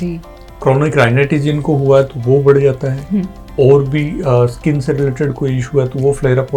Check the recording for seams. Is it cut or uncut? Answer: uncut